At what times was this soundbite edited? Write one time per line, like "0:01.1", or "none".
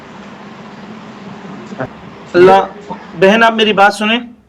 0:01.9